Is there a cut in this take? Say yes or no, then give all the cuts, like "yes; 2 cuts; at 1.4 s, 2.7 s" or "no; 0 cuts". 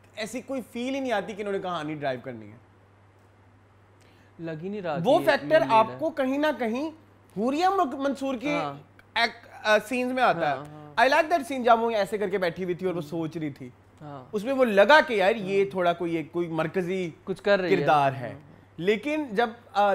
no; 0 cuts